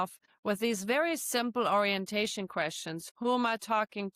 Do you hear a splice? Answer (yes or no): yes